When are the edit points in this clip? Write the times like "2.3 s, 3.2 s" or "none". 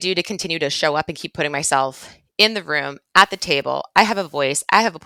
none